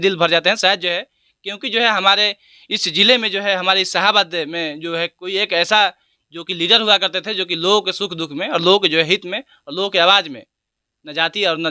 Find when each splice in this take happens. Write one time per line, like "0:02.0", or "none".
none

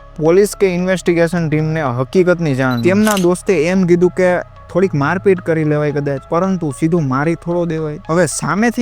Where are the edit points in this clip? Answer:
0:02.8

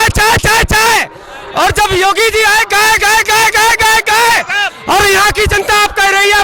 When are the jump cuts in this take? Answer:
none

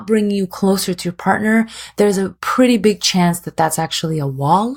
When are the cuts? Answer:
0:02.1

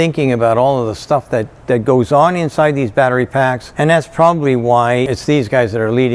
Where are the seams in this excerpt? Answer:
0:03.7
0:05.1

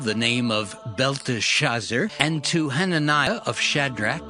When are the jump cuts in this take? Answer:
0:02.1
0:03.3

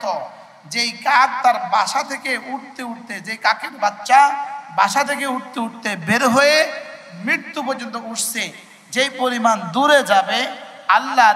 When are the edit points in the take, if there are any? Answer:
none

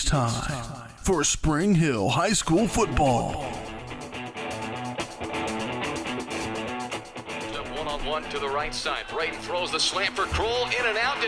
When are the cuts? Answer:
none

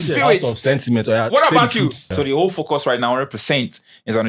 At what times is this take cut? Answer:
0:02.0

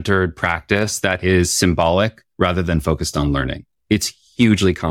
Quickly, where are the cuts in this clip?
0:02.2
0:03.7

